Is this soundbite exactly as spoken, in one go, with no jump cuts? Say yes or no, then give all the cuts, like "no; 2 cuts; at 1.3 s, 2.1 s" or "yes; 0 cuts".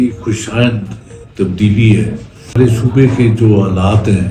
no; 1 cut; at 2.6 s